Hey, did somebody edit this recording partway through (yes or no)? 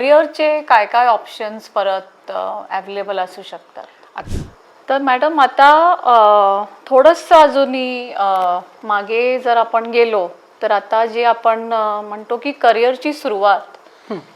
yes